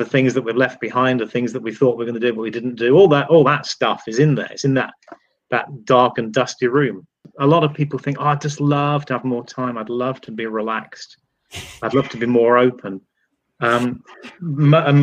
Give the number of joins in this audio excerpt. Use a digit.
1